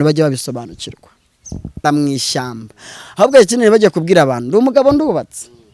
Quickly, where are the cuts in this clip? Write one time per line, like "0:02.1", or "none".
0:01.8